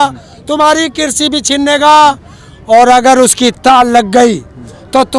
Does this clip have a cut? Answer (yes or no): no